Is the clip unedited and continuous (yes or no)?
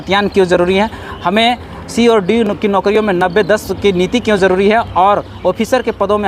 yes